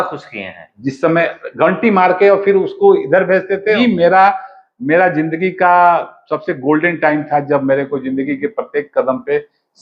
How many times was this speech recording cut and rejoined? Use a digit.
1